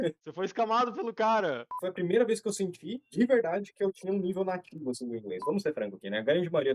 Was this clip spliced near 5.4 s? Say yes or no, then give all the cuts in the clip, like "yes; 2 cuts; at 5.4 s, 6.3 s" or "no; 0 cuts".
yes; 2 cuts; at 1.7 s, 5.4 s